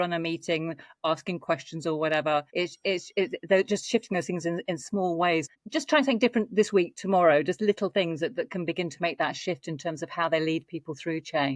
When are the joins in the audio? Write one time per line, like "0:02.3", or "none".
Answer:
0:02.5
0:05.5